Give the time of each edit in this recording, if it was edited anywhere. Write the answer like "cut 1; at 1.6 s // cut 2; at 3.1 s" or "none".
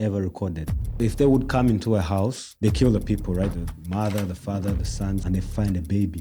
cut 1; at 1.0 s // cut 2; at 2.4 s // cut 3; at 3.5 s // cut 4; at 5.2 s